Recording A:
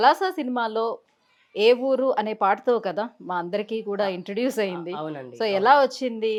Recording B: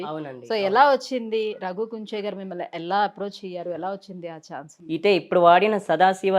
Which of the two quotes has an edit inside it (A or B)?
B